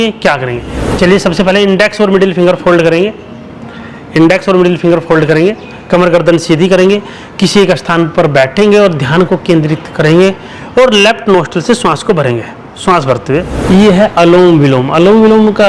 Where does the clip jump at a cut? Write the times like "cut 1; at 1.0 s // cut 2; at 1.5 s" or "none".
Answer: cut 1; at 13.6 s